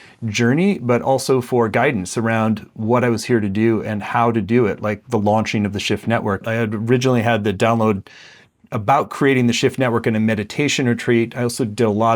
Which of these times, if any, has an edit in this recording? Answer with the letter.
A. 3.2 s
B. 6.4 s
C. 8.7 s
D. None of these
B